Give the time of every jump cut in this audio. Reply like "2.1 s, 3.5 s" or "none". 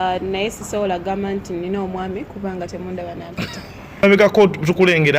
4.0 s

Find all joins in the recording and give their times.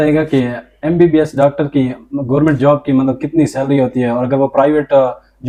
none

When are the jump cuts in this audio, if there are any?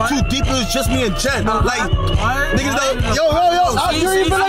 none

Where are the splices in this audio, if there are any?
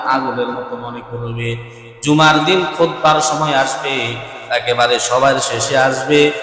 none

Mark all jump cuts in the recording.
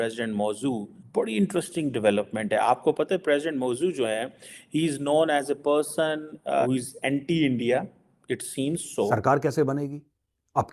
1.0 s, 6.7 s, 9.1 s

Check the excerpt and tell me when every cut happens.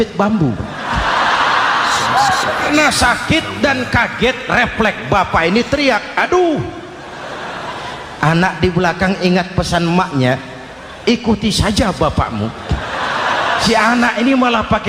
2.7 s, 13.6 s

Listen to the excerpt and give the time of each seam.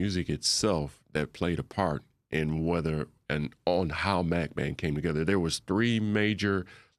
none

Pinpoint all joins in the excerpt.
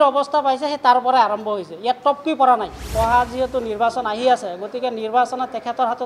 2.9 s

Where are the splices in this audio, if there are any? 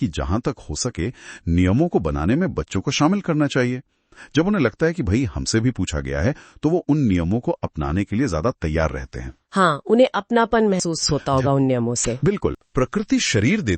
12.6 s

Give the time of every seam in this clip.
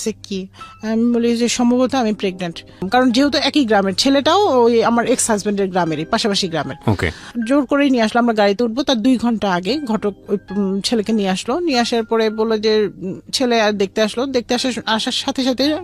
2.8 s

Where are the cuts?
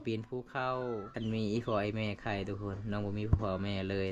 1.1 s

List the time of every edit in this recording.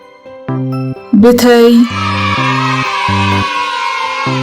1.0 s

